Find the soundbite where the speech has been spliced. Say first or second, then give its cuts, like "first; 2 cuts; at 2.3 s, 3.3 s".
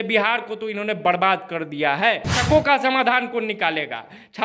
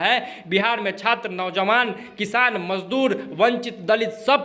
first; 1 cut; at 2.4 s